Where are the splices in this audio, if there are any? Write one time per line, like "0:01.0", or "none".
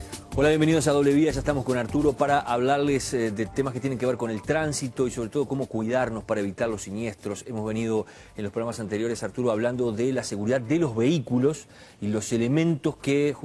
none